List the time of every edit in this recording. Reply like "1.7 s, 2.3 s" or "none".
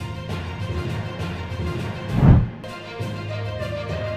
none